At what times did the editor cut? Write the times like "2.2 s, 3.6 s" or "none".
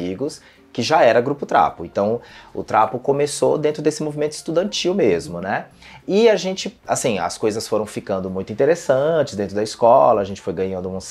none